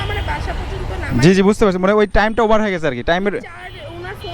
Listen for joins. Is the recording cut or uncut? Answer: uncut